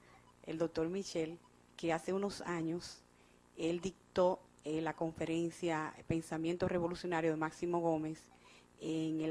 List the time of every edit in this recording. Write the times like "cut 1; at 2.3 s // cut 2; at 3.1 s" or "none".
cut 1; at 1.5 s